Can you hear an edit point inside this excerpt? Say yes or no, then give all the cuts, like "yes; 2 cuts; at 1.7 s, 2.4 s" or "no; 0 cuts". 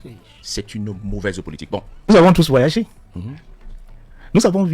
yes; 1 cut; at 2.1 s